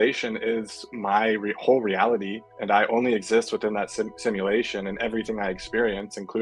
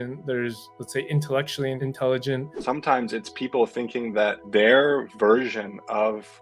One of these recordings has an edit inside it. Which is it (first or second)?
second